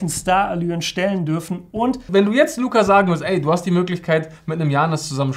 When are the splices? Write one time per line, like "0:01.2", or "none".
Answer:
0:02.1